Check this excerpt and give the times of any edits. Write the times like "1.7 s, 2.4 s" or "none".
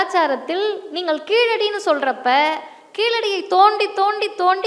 none